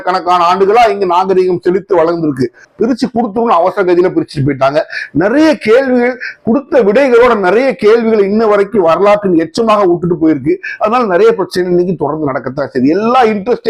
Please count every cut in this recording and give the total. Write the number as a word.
one